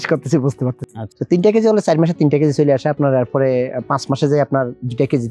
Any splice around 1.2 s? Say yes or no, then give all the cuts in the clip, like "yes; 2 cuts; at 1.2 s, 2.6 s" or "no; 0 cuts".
yes; 1 cut; at 1.2 s